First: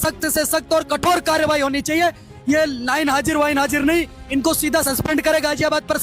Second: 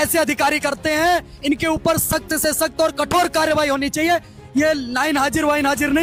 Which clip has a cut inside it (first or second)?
first